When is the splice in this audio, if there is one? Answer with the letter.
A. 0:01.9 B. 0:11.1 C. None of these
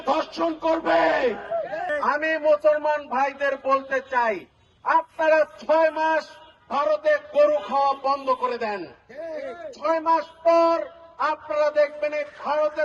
A